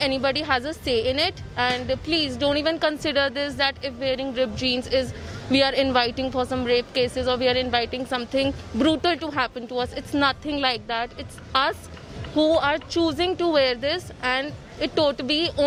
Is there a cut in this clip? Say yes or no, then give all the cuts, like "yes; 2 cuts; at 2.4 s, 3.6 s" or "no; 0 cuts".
no; 0 cuts